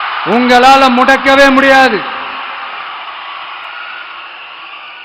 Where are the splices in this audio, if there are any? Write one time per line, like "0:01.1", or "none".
none